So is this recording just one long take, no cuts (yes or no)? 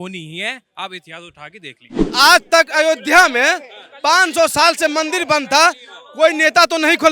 no